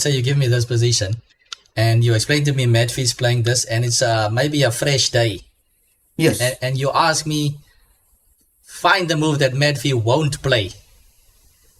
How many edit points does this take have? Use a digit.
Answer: 0